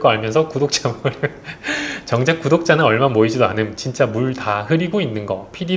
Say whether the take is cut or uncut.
uncut